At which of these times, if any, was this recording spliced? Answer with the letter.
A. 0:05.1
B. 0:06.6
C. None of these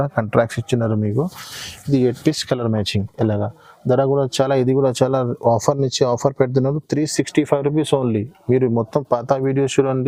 C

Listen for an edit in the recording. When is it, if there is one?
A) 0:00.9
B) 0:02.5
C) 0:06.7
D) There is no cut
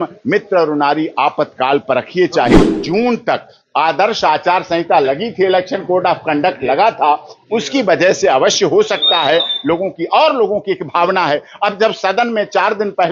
B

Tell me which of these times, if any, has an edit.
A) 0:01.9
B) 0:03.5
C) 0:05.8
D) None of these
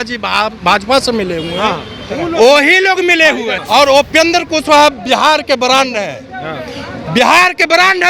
B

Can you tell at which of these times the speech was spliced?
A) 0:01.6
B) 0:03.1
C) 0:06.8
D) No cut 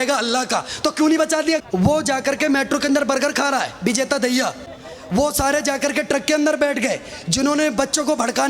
A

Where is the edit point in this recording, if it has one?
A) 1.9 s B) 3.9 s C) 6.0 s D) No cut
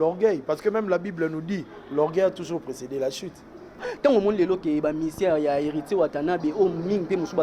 B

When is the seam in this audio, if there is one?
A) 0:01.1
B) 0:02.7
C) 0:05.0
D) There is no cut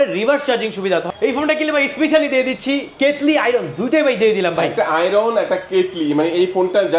A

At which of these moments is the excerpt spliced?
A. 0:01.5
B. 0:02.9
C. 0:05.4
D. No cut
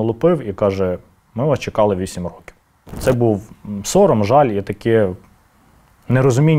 B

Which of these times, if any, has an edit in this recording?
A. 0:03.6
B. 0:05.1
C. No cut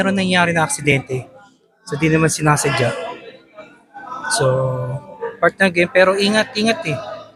C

